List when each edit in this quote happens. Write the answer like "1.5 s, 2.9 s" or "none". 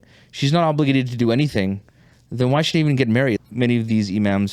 3.4 s